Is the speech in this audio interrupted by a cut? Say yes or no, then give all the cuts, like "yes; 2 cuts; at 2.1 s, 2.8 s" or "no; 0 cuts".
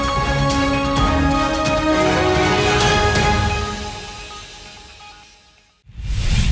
yes; 1 cut; at 5.6 s